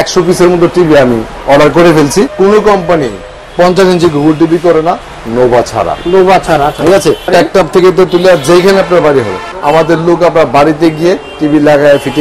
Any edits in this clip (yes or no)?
yes